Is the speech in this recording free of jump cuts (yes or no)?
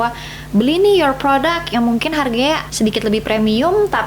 no